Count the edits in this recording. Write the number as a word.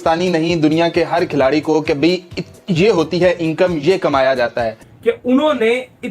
one